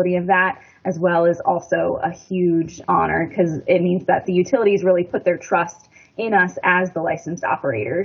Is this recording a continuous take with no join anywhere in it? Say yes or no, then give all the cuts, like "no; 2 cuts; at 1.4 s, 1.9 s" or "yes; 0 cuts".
no; 2 cuts; at 2.8 s, 4.2 s